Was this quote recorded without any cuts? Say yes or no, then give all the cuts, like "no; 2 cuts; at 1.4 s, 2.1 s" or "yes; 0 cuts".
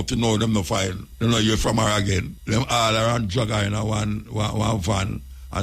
no; 2 cuts; at 1.0 s, 2.3 s